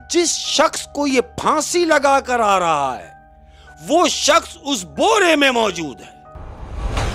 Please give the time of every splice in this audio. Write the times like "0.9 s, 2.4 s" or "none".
none